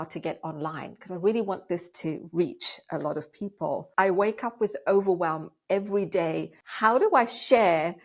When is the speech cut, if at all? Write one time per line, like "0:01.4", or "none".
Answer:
0:03.9
0:06.6